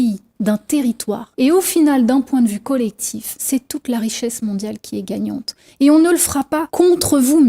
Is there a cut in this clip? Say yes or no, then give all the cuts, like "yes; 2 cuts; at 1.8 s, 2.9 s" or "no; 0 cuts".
yes; 1 cut; at 1.2 s